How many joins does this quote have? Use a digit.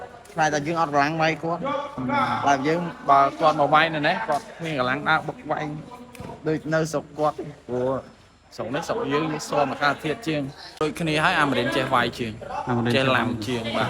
1